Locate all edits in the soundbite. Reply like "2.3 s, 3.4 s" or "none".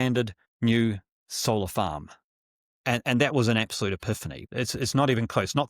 4.3 s